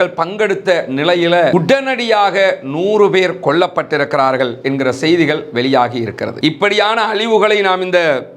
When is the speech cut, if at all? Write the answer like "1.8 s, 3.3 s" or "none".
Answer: 6.3 s